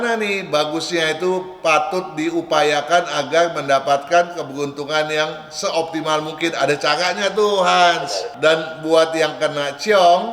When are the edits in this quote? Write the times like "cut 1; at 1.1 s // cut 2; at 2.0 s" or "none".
cut 1; at 8.2 s